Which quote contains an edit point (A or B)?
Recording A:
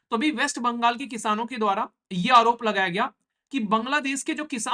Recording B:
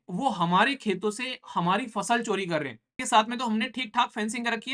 B